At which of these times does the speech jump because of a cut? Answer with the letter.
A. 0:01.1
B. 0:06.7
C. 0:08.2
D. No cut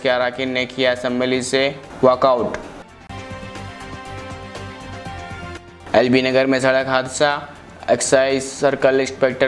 D